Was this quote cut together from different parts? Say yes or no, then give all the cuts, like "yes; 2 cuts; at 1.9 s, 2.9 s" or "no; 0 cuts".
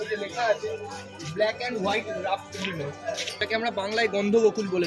yes; 1 cut; at 3.4 s